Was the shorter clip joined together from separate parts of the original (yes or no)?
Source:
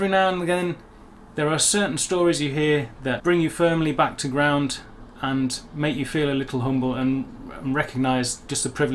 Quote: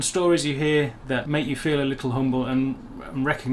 yes